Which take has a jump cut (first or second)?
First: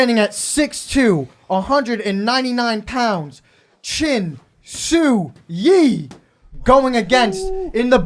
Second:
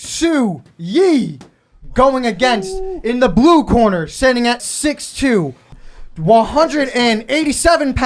second